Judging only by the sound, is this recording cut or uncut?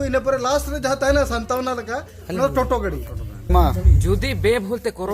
cut